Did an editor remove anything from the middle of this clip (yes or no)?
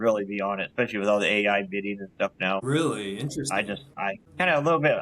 yes